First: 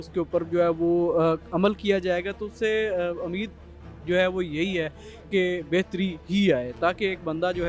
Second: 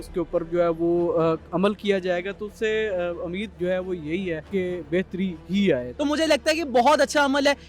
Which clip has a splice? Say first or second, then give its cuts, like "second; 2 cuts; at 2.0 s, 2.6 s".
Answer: second; 3 cuts; at 3.5 s, 4.4 s, 5.9 s